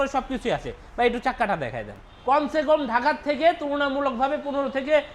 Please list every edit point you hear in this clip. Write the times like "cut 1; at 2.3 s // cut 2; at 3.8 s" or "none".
cut 1; at 2.1 s